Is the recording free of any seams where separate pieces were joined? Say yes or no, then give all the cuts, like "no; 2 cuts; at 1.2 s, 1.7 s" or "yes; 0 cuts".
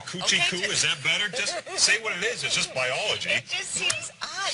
yes; 0 cuts